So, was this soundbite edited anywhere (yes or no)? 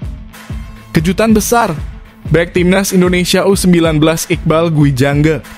yes